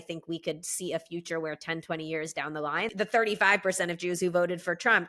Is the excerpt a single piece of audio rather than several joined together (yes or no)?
no